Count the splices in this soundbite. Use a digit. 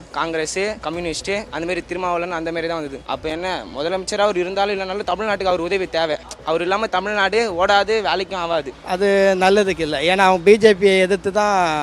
4